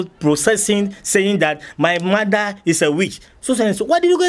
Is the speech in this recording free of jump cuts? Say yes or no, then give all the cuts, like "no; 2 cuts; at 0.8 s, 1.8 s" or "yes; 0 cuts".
yes; 0 cuts